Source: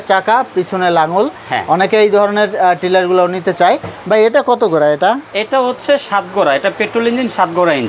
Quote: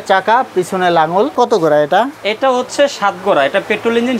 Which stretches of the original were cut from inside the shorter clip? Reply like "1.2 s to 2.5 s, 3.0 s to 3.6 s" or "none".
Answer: 1.3 s to 4.4 s